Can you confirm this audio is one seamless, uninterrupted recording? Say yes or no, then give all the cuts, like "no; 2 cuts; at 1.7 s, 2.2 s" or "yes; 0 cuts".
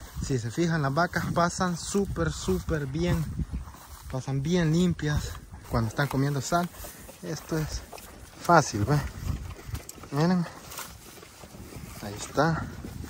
no; 1 cut; at 5.7 s